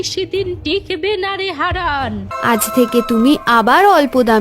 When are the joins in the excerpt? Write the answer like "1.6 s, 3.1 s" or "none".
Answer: 2.3 s